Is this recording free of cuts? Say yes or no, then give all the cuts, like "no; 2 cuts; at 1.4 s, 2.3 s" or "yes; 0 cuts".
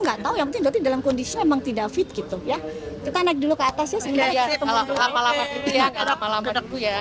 yes; 0 cuts